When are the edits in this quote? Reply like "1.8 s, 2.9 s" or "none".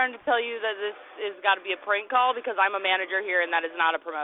none